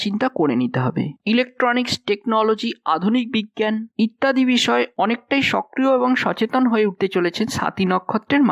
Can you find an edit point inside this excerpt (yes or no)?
yes